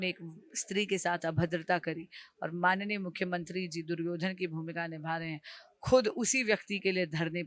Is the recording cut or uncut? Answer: uncut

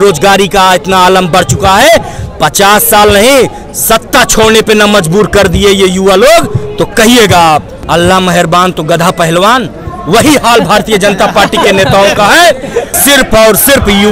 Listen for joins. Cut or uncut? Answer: cut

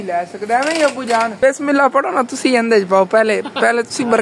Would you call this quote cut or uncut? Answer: cut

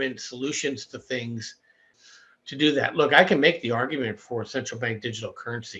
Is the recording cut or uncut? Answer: cut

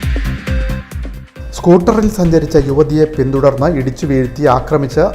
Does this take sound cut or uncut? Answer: uncut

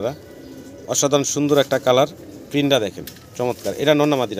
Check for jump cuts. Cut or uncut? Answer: uncut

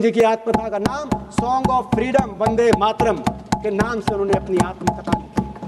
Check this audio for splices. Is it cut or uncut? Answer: uncut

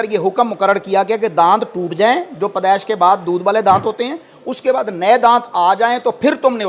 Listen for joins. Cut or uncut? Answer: uncut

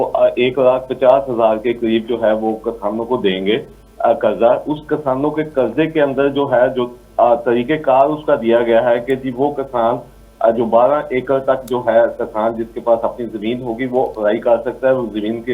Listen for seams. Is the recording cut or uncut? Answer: uncut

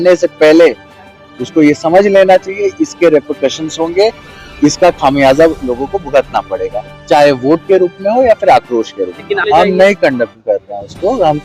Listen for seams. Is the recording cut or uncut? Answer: cut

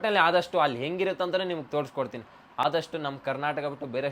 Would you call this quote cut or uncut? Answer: uncut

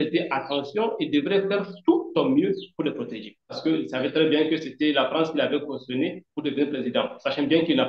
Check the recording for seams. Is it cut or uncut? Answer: cut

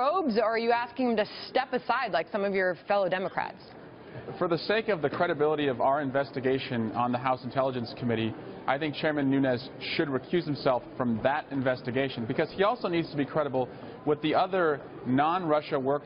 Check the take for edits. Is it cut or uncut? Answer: cut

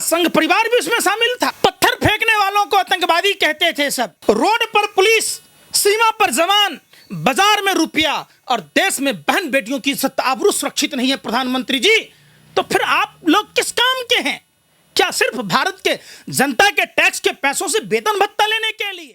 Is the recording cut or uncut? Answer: cut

